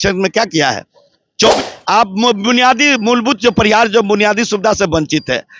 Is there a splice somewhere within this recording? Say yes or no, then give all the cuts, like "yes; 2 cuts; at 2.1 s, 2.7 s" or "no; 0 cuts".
yes; 1 cut; at 1.5 s